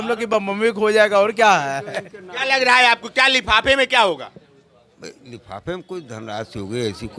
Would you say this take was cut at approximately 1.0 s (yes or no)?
no